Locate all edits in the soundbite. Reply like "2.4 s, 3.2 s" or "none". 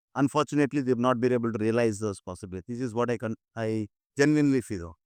none